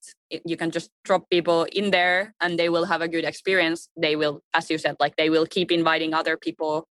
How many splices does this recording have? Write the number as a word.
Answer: one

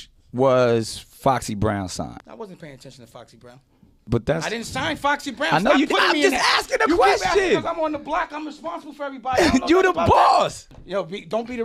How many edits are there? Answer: three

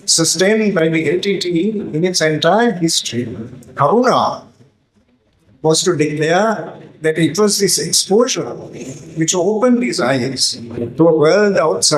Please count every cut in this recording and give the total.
zero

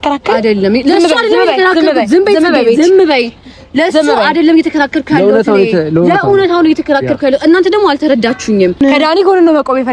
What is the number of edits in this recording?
one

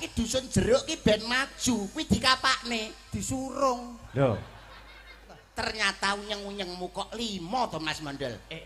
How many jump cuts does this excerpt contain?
one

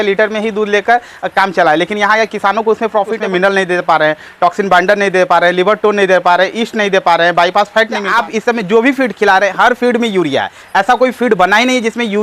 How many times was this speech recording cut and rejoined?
two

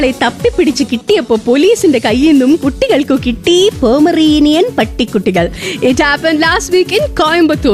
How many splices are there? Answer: zero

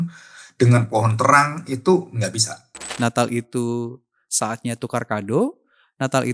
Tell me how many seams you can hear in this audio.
one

